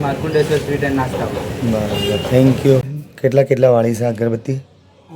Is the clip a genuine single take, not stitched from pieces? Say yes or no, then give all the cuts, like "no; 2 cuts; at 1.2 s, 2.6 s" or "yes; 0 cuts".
no; 1 cut; at 3.0 s